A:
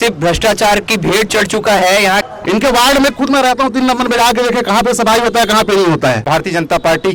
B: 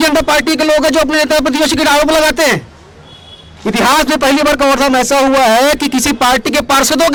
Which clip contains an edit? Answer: A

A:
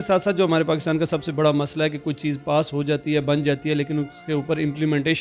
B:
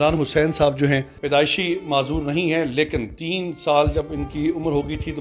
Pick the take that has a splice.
B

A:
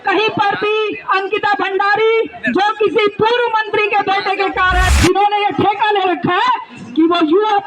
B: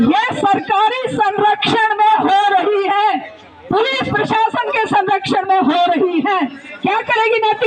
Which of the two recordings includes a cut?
A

